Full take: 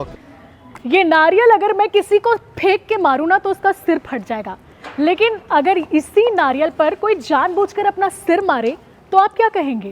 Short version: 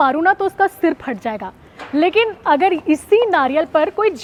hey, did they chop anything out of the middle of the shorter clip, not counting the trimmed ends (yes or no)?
no